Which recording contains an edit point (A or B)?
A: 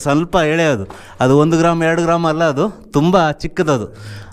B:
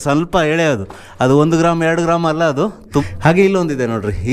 B